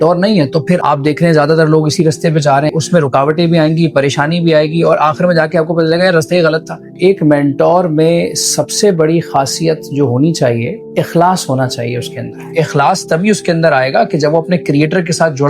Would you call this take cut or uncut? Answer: cut